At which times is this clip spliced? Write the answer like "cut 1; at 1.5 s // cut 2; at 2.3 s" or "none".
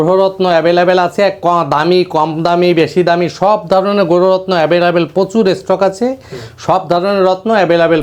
none